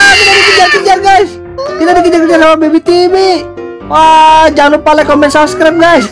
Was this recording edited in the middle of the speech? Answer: no; 0 cuts

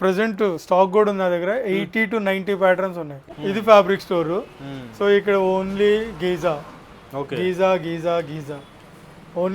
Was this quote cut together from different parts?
yes; 1 cut; at 3.3 s

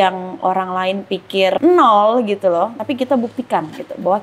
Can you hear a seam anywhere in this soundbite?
yes; 2 cuts; at 1.6 s, 2.8 s

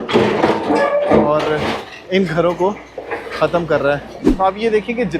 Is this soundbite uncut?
no; 1 cut; at 4.2 s

